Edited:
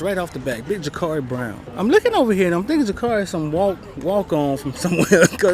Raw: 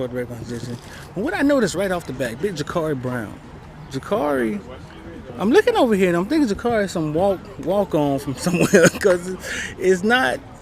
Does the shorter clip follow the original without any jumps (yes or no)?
no